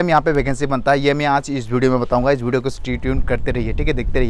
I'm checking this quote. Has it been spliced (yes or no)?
no